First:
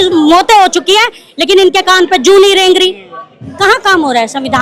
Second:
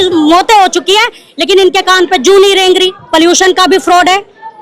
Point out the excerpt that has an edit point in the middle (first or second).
second